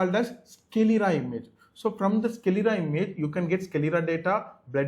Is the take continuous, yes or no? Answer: yes